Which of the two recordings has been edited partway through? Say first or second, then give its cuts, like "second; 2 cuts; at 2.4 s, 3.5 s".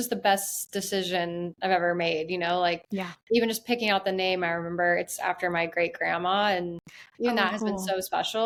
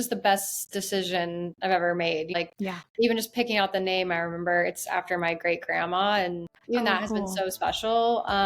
second; 2 cuts; at 2.4 s, 6.5 s